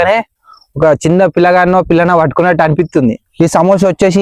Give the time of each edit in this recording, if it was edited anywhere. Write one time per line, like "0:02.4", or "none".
0:03.2